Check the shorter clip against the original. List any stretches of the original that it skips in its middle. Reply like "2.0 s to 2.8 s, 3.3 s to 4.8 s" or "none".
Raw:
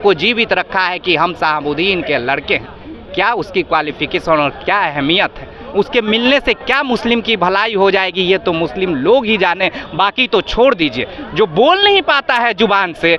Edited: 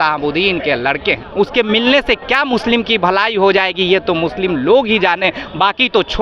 2.7 s to 5.6 s